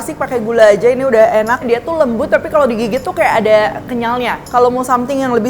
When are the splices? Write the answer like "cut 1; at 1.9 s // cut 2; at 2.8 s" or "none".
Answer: cut 1; at 1.6 s // cut 2; at 4.4 s